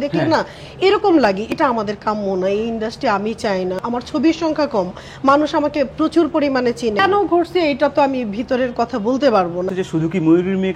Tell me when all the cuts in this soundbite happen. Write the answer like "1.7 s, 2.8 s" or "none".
1.4 s, 3.8 s, 7.0 s, 9.7 s